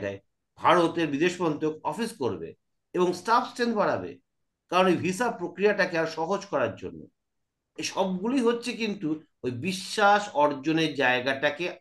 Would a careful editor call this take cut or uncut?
uncut